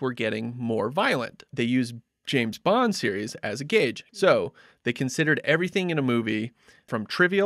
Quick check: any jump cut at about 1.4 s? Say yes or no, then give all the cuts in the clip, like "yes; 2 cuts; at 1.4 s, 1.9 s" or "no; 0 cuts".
yes; 2 cuts; at 1.4 s, 4.0 s